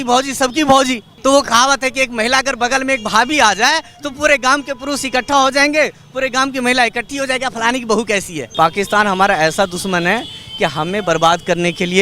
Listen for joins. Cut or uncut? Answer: cut